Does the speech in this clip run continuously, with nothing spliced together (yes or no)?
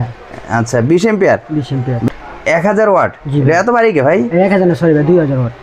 no